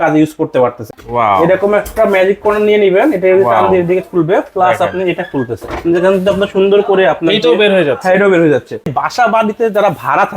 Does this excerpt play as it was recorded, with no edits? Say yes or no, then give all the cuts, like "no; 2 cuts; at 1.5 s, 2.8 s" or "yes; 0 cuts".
no; 2 cuts; at 1.0 s, 8.9 s